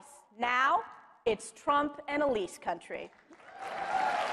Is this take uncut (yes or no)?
yes